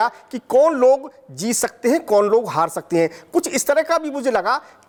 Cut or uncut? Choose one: uncut